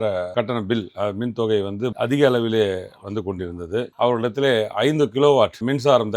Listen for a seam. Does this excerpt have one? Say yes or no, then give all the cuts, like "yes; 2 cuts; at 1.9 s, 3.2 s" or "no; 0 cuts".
yes; 1 cut; at 3.9 s